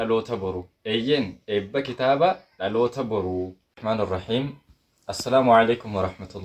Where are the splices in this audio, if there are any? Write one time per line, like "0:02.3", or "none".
0:03.5